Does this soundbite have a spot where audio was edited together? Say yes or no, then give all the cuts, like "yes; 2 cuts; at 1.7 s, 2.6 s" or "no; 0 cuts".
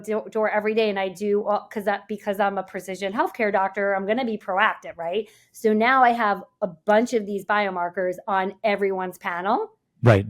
no; 0 cuts